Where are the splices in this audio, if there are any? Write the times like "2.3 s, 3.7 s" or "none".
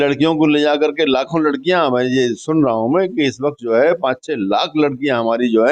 none